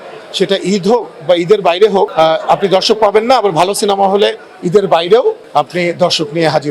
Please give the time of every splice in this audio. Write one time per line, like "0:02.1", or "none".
0:02.1
0:05.4

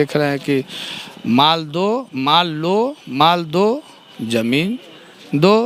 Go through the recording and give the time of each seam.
none

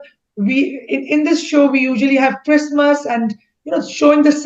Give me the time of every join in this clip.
none

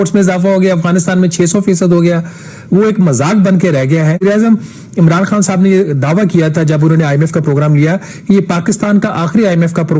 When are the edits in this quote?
0:04.2

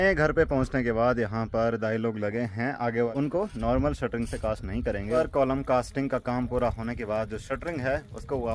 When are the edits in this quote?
0:03.1
0:05.2

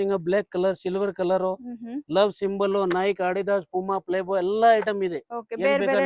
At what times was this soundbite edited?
none

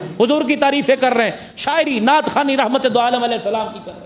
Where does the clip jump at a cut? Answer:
none

